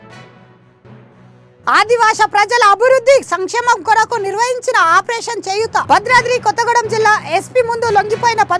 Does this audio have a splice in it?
yes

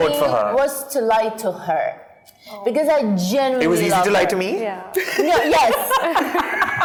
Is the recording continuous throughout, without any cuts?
yes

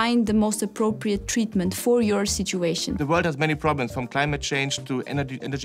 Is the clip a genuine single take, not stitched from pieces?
no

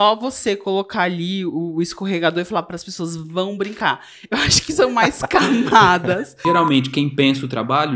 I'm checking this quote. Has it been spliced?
yes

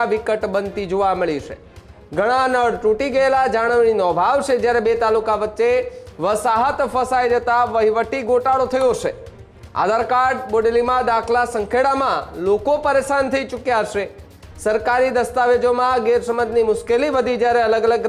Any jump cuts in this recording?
no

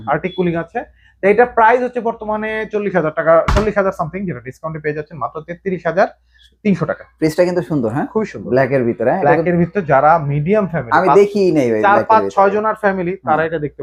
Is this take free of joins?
yes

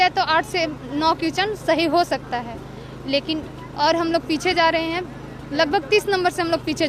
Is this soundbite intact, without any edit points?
yes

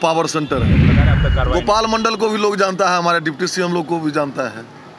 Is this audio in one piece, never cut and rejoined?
no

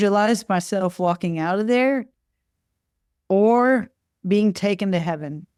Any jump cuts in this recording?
no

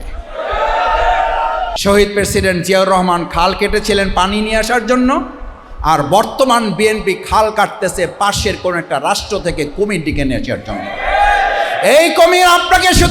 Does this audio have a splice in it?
yes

